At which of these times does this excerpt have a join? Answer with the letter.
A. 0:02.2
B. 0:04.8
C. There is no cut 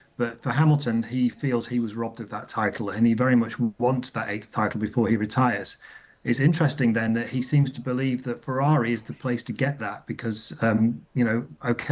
B